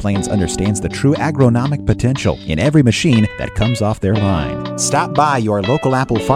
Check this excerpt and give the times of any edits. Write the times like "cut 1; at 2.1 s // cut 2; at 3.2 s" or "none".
none